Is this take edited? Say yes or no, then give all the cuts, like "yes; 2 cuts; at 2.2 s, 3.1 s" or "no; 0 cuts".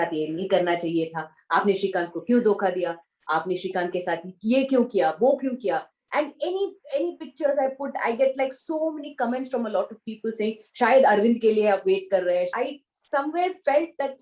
yes; 1 cut; at 12.5 s